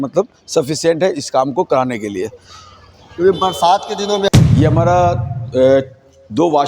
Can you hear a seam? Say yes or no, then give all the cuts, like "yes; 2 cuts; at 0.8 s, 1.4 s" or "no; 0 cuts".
yes; 1 cut; at 4.3 s